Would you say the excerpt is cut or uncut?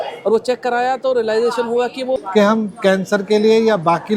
cut